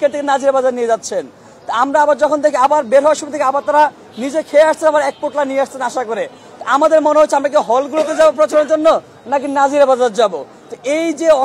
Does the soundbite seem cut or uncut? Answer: uncut